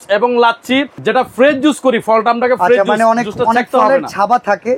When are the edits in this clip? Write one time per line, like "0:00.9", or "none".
0:00.9